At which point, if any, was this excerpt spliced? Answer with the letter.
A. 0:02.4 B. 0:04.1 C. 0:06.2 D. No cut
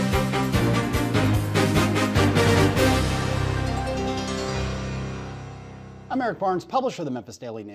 A